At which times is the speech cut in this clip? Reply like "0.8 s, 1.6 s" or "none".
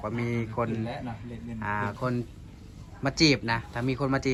none